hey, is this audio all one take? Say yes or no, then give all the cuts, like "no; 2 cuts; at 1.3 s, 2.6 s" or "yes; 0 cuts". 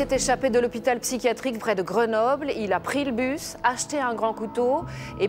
no; 1 cut; at 1.6 s